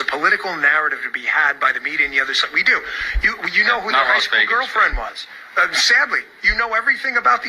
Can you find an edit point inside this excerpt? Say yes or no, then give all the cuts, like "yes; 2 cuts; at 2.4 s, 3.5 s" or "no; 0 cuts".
no; 0 cuts